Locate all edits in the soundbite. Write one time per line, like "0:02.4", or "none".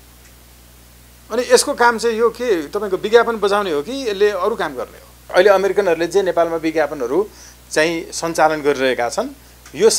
0:05.2